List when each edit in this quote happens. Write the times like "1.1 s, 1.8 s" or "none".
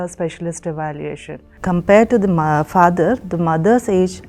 1.4 s